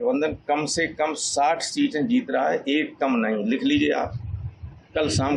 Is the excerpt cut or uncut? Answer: uncut